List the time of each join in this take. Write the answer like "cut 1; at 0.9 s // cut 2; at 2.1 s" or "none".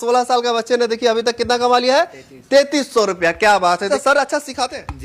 cut 1; at 3.9 s